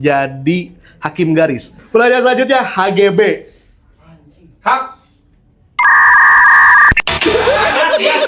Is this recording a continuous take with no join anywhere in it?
no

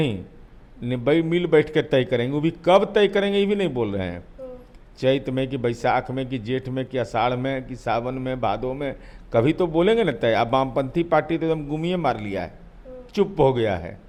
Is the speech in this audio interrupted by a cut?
no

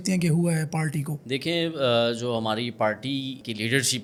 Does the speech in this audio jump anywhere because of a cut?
no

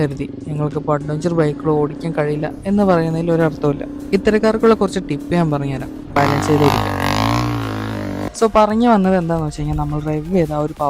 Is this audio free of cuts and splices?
no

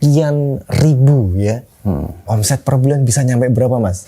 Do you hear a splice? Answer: yes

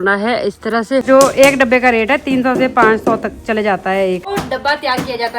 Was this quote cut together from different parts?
yes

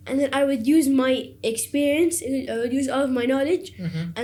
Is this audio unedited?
yes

